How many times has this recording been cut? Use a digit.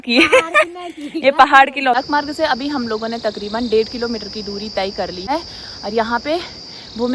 2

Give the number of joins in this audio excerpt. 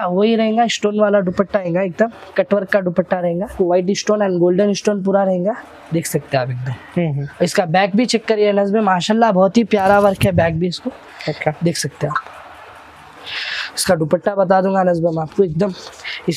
1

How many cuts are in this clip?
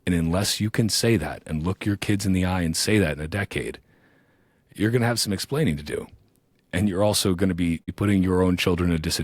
1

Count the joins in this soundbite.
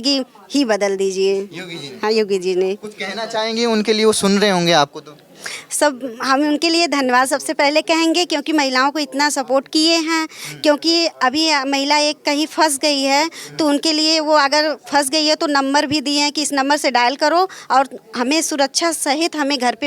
0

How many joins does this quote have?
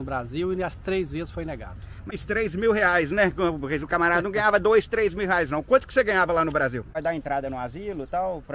2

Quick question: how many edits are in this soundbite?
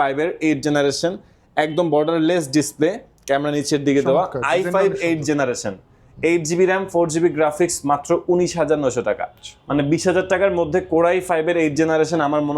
0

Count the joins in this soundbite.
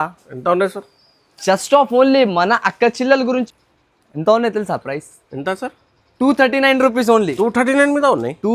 1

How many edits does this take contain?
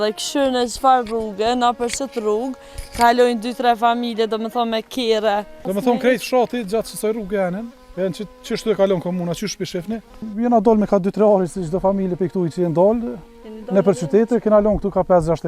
3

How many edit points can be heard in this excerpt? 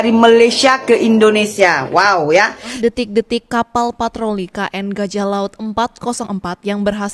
1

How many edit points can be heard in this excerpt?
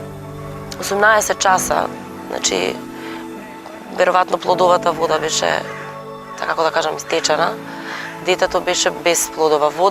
1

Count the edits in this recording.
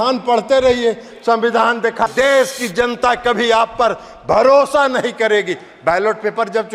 1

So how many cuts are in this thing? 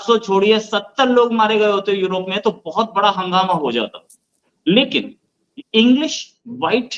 0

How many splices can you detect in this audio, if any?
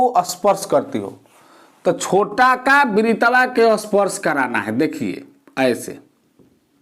0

